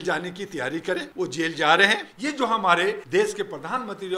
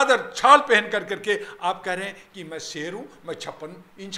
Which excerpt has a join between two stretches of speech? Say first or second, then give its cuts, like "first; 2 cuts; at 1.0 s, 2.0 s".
first; 3 cuts; at 1.1 s, 2.1 s, 3.0 s